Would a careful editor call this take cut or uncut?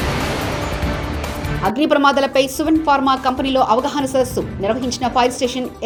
uncut